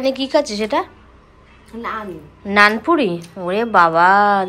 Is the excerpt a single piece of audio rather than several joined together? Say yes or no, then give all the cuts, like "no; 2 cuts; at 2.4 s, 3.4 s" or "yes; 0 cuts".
yes; 0 cuts